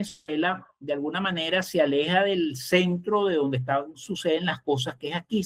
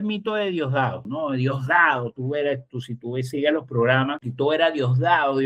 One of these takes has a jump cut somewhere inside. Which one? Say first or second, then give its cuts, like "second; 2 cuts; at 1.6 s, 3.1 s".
second; 2 cuts; at 1.0 s, 4.2 s